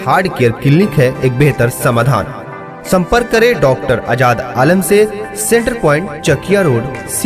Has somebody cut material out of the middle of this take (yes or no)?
no